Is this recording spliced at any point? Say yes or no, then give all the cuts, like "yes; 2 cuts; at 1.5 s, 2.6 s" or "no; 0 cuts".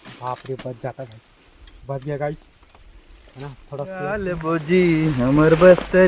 yes; 1 cut; at 4.2 s